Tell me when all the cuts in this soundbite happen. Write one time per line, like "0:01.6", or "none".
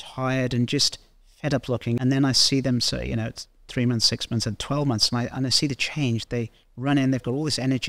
0:02.0

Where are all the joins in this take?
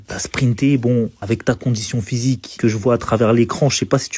0:01.2

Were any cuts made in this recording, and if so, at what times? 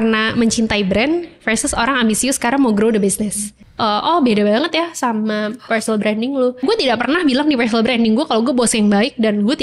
0:03.6
0:06.6

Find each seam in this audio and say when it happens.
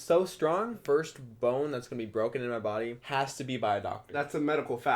0:00.8
0:03.0
0:04.1

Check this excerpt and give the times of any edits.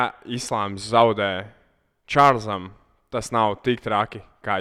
none

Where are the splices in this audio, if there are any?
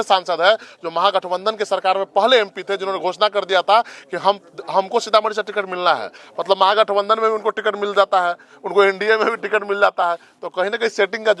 none

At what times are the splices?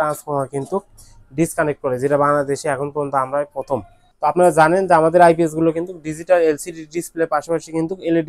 0:04.0

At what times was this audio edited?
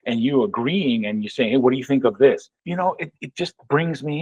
0:02.5

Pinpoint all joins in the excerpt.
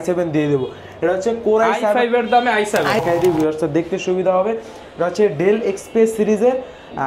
0:03.0

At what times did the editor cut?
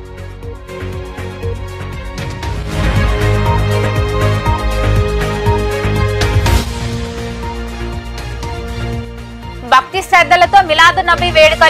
0:01.3

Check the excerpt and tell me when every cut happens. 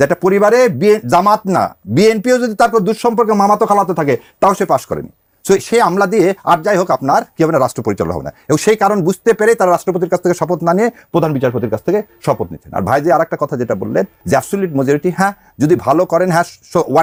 none

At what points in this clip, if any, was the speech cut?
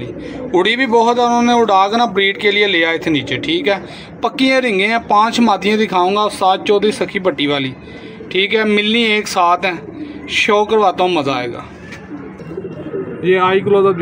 none

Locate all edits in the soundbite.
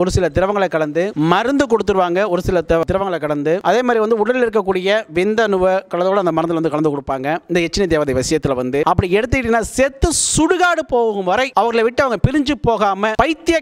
none

